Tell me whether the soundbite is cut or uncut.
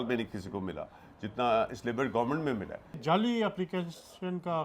cut